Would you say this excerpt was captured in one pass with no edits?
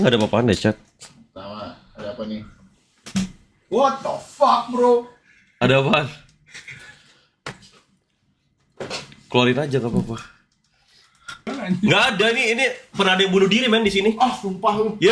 no; 1 cut; at 11.5 s

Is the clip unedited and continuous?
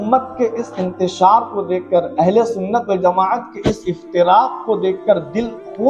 yes; 0 cuts

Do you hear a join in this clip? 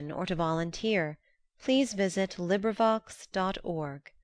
no; 0 cuts

